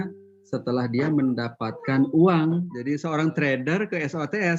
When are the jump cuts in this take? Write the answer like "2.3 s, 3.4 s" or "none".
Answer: 2.7 s